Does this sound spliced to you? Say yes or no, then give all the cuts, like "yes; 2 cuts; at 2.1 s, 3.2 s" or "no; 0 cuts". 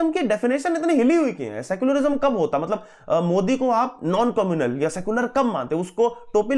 no; 0 cuts